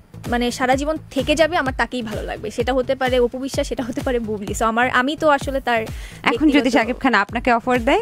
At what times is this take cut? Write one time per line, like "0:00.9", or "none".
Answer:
none